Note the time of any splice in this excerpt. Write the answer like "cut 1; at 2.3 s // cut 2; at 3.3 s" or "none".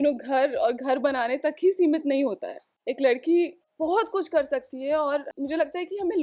cut 1; at 5.3 s